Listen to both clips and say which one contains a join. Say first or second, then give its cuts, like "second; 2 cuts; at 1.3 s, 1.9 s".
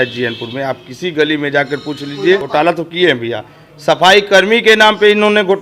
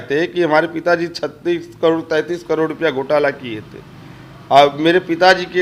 first; 1 cut; at 2.5 s